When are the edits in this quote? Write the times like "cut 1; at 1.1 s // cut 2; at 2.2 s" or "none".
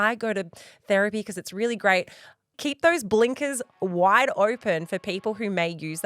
cut 1; at 2.5 s // cut 2; at 3.8 s